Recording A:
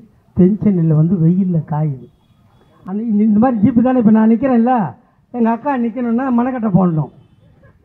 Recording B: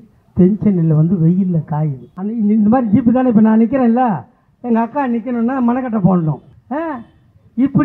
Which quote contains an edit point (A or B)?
B